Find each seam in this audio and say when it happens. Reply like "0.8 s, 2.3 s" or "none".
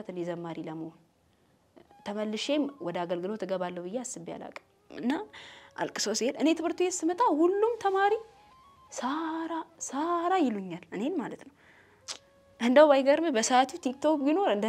4.9 s